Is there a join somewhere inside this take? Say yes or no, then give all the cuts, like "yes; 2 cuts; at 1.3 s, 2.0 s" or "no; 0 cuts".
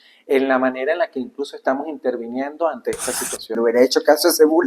yes; 1 cut; at 3.6 s